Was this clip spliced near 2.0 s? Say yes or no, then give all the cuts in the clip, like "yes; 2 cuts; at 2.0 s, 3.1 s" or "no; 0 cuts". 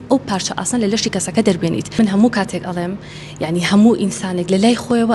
yes; 1 cut; at 2.0 s